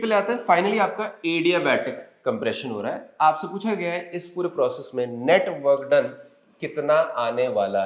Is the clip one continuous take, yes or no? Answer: yes